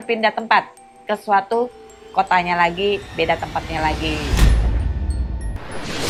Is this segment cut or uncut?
uncut